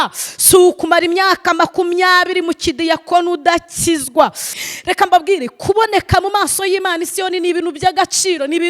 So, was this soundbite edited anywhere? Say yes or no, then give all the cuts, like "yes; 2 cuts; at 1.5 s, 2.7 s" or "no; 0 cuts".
yes; 1 cut; at 4.5 s